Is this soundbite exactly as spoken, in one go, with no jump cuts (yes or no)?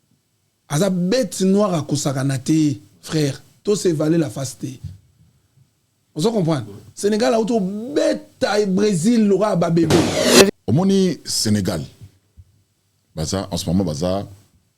no